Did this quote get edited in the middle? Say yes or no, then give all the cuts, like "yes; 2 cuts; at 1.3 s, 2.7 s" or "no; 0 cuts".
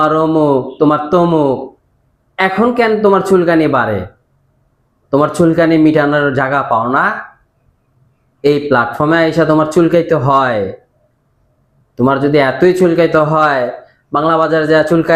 no; 0 cuts